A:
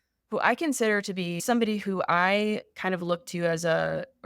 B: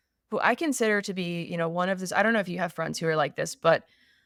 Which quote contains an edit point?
A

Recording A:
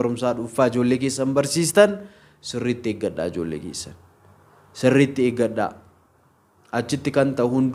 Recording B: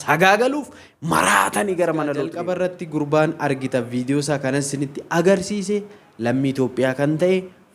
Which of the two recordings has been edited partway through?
B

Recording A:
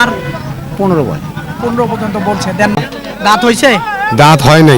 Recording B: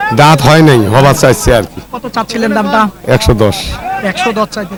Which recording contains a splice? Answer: A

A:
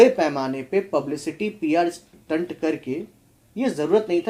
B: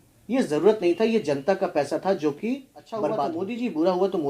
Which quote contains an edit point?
B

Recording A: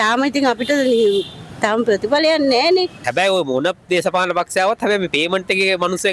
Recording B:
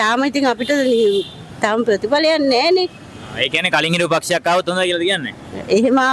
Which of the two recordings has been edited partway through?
A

